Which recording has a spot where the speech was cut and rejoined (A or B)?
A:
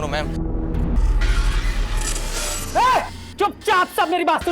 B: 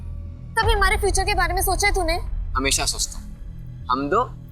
A